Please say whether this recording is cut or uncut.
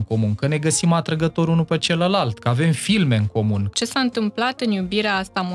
cut